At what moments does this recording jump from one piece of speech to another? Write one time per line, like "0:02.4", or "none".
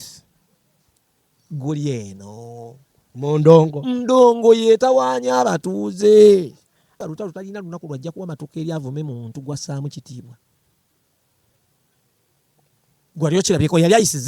0:07.0